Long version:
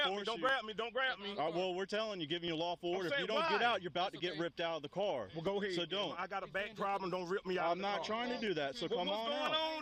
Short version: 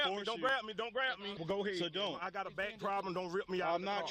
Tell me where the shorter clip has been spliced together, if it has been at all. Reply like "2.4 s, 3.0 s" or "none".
1.3 s